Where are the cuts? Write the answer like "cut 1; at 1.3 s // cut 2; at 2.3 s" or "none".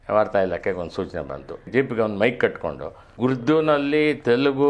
cut 1; at 1.6 s // cut 2; at 3.1 s